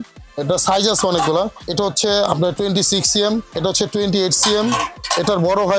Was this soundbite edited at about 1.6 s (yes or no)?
yes